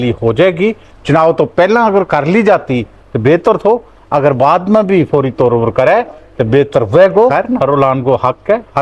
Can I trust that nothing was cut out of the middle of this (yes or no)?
no